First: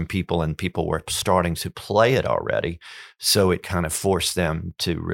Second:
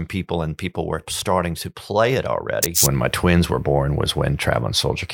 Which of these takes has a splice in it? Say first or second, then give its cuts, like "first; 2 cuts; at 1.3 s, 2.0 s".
second; 1 cut; at 2.8 s